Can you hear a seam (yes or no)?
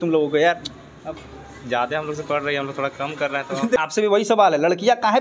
yes